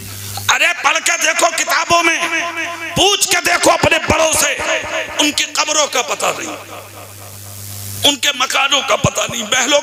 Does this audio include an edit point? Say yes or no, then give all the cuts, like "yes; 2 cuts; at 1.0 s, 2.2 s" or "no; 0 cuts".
no; 0 cuts